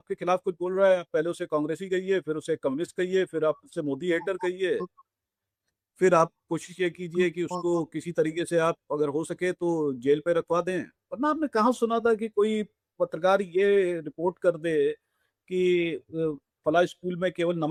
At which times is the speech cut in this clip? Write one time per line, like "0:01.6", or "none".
none